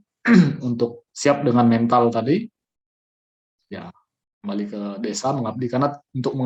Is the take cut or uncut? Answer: uncut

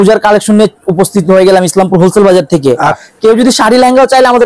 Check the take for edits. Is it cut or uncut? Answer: cut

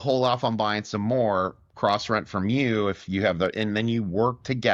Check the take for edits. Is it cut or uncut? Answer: uncut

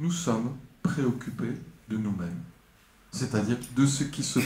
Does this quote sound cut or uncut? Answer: uncut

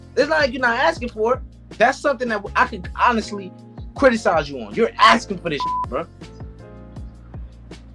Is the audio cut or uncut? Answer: cut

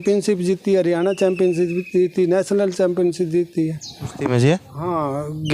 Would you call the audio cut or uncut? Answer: uncut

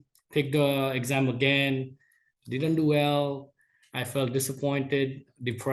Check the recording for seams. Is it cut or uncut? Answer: uncut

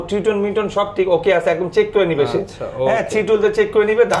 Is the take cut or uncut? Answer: uncut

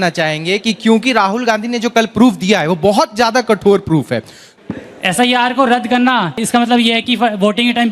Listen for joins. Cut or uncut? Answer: cut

